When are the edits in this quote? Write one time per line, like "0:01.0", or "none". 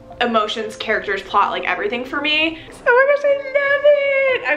0:02.7

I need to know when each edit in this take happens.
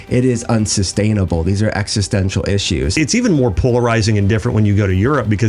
0:03.0

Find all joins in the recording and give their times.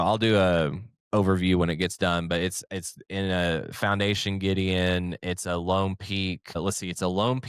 0:06.6

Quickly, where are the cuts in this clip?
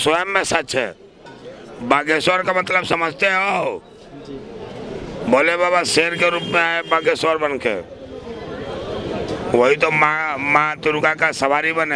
none

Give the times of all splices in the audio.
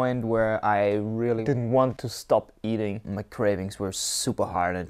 0:01.4
0:02.1
0:03.1

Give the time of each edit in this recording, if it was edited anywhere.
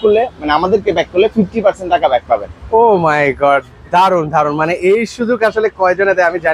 none

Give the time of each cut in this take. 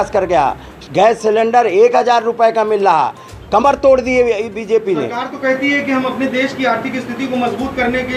none

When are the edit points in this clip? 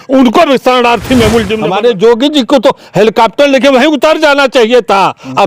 0:01.6

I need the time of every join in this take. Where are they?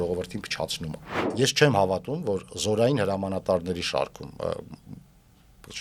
0:01.3

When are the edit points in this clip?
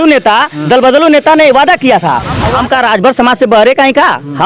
0:02.4

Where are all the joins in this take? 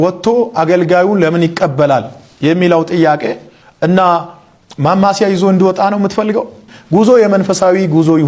none

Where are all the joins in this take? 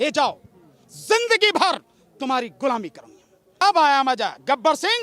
0:03.6

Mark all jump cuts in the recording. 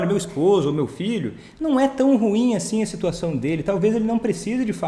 none

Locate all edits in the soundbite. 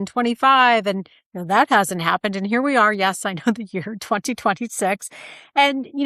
none

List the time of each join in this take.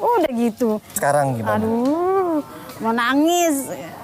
0:01.0

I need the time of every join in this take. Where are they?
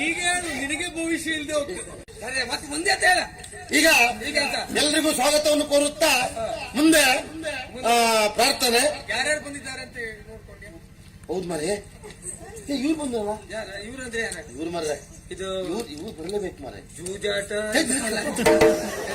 0:02.1

